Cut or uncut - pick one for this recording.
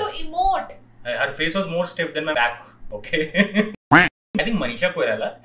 cut